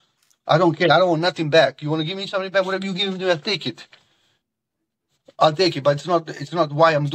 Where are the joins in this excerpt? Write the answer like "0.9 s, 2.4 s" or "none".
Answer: none